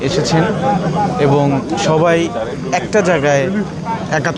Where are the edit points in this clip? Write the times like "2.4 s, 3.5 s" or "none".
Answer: none